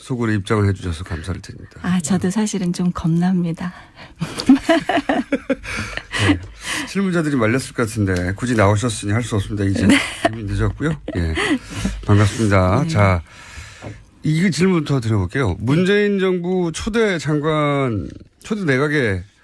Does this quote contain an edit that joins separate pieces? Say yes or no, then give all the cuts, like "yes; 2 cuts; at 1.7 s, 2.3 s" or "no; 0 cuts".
no; 0 cuts